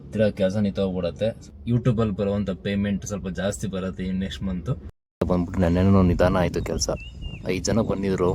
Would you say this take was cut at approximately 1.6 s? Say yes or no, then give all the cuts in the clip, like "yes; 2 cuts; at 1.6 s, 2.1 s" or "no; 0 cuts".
yes; 2 cuts; at 1.6 s, 5.2 s